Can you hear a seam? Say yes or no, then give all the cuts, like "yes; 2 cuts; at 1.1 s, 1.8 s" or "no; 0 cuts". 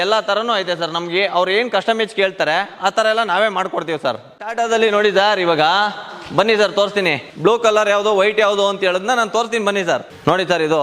no; 0 cuts